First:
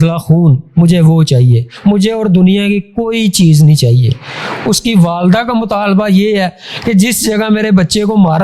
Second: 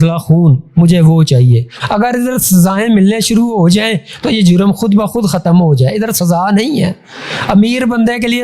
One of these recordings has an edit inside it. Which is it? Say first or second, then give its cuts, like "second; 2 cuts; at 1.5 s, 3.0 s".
second; 1 cut; at 1.7 s